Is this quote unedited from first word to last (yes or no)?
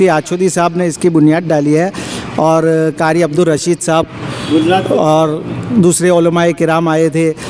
yes